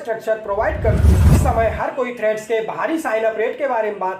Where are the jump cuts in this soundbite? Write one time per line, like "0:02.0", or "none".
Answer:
0:01.3